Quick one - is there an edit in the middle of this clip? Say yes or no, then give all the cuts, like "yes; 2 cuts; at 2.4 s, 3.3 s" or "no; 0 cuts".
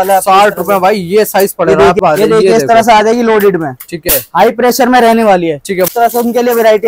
yes; 2 cuts; at 2.0 s, 5.9 s